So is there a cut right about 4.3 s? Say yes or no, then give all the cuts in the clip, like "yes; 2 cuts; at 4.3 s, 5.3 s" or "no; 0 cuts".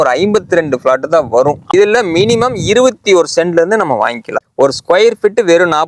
yes; 2 cuts; at 1.7 s, 4.3 s